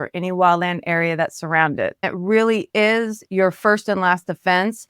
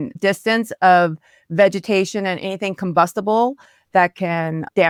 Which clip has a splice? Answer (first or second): first